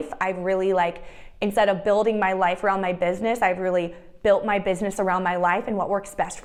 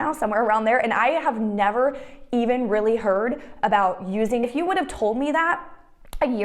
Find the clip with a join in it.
second; 1 cut; at 4.5 s

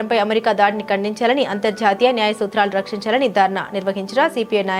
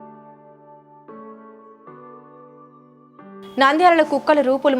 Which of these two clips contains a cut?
second; 1 cut; at 1.3 s

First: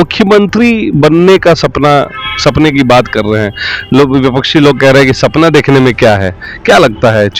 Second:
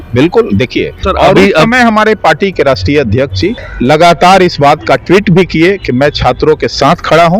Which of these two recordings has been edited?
second; 2 cuts; at 1.0 s, 3.7 s

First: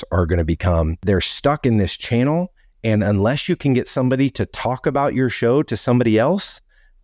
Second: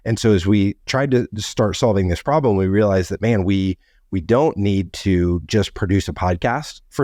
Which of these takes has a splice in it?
first; 1 cut; at 1.0 s

